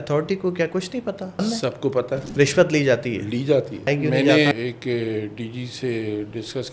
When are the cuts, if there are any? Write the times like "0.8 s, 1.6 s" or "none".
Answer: 1.4 s, 2.3 s, 3.9 s, 4.5 s